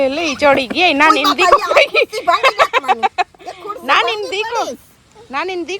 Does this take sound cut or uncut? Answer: uncut